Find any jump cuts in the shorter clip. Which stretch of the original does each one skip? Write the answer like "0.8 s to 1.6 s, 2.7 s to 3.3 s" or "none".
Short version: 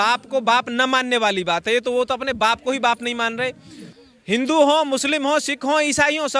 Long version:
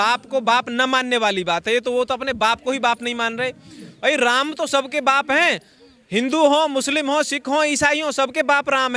3.9 s to 5.7 s